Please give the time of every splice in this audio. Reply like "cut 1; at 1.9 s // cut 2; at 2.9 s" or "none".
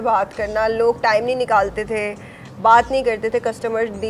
none